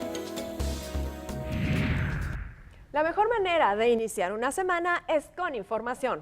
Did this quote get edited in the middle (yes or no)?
yes